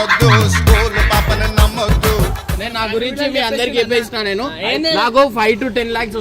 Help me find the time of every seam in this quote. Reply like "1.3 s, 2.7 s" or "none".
2.4 s